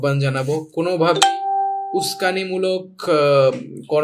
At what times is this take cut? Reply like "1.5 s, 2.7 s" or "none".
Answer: none